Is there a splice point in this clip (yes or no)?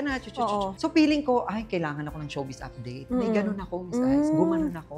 no